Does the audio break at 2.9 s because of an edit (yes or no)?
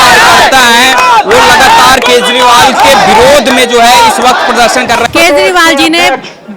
no